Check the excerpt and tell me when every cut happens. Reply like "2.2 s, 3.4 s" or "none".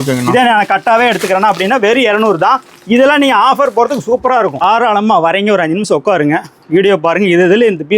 4.6 s